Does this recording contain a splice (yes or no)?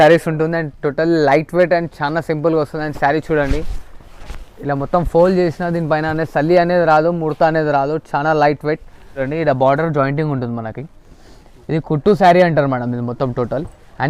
yes